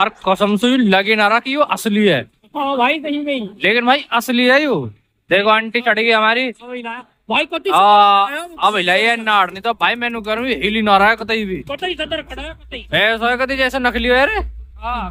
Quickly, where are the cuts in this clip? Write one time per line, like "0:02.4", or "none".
none